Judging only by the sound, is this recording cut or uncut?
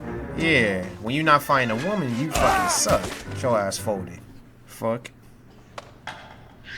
cut